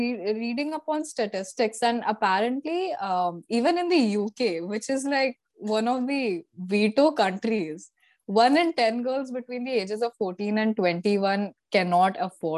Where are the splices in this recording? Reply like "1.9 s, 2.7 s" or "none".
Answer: none